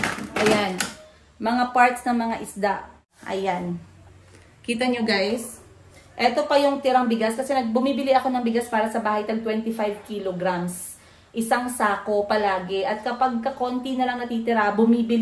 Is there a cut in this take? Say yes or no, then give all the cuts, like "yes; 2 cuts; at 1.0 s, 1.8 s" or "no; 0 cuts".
yes; 1 cut; at 3.1 s